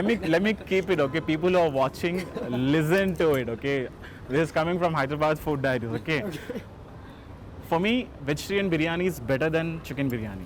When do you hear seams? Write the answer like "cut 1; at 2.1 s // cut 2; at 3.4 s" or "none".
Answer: none